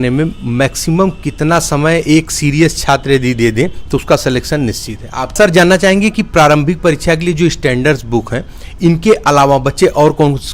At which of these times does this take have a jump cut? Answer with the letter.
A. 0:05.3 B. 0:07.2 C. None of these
A